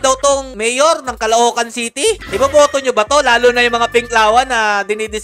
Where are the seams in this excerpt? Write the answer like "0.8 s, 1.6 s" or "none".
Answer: 2.3 s